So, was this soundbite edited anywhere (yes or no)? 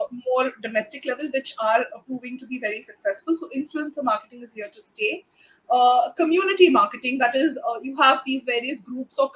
no